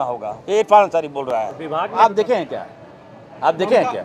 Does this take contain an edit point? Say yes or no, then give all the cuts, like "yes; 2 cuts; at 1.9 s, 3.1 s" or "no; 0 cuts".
yes; 1 cut; at 1.9 s